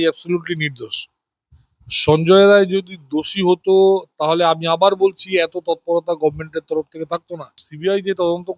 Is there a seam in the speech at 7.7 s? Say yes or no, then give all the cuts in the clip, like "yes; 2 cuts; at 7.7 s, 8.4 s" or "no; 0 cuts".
yes; 1 cut; at 7.7 s